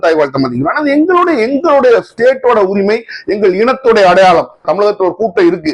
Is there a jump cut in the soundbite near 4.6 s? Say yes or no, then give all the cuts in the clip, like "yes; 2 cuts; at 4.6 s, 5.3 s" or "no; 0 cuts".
yes; 1 cut; at 4.6 s